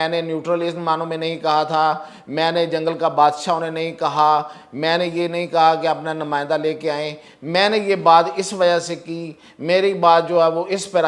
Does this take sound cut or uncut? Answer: uncut